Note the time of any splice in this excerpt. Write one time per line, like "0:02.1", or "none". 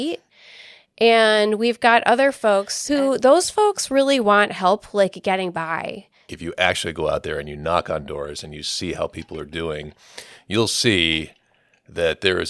0:02.8
0:06.2